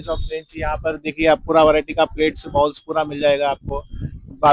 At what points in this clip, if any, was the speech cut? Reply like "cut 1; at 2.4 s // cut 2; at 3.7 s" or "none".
none